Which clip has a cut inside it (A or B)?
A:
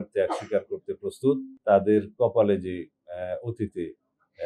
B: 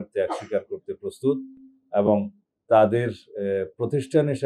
A